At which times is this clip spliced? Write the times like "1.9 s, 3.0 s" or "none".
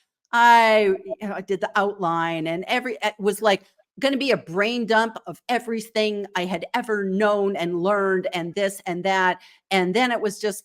none